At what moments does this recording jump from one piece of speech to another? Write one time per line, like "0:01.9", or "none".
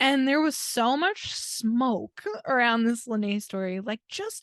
0:02.4